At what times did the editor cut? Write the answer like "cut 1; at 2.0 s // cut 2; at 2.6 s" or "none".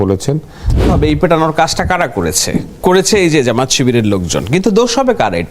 cut 1; at 0.9 s